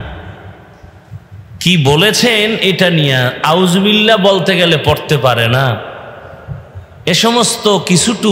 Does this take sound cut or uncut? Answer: uncut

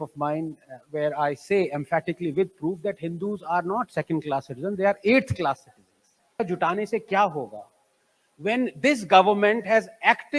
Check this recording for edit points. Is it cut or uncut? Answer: cut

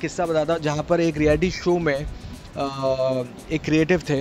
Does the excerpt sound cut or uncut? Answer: uncut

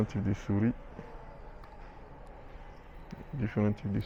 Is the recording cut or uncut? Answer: uncut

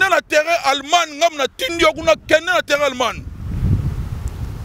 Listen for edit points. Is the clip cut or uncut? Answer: uncut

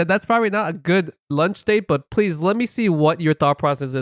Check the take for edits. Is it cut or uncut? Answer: cut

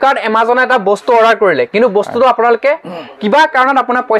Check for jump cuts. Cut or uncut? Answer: uncut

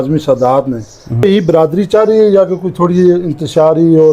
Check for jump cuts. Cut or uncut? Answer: cut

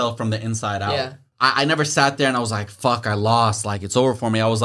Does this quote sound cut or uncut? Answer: cut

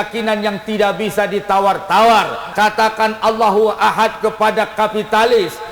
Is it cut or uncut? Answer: cut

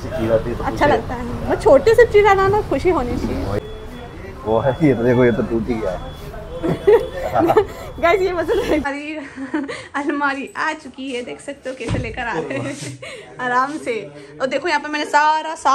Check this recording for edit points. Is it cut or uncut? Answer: cut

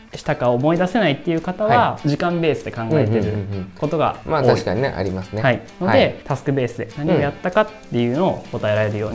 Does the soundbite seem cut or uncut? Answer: uncut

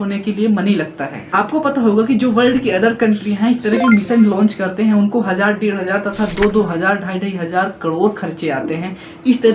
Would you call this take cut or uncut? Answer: uncut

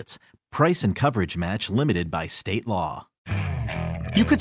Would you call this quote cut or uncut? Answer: cut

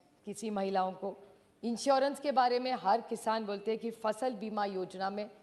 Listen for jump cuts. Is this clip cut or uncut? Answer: uncut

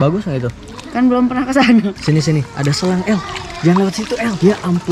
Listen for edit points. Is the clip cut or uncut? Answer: cut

